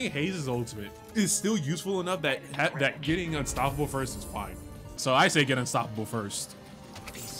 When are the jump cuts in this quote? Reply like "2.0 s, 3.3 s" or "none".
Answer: 1.0 s, 5.0 s